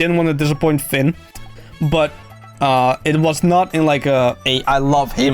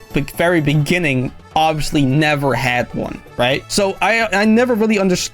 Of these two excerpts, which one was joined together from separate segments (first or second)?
second